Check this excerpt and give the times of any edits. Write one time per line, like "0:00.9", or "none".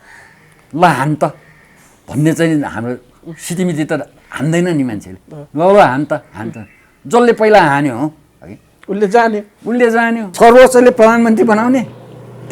0:10.2